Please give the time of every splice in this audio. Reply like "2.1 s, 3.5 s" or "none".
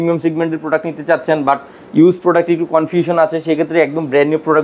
none